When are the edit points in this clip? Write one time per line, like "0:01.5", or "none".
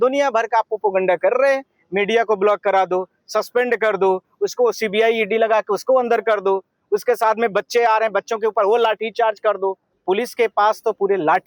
0:09.9